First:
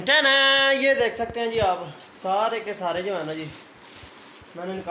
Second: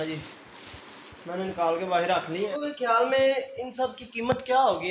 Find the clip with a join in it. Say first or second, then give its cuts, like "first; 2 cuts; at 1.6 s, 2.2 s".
second; 1 cut; at 2.5 s